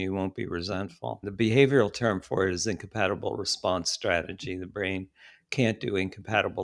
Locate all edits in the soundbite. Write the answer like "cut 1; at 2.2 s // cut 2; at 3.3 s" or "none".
cut 1; at 1.2 s